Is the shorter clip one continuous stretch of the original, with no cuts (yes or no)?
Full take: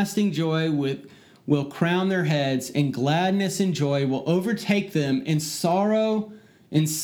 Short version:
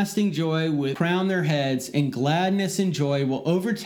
no